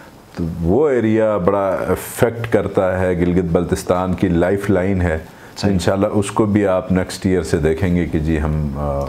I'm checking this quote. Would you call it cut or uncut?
uncut